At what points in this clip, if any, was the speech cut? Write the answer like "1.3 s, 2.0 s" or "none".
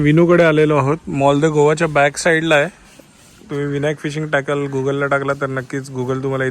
none